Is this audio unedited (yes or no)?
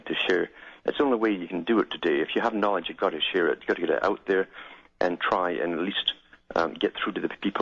yes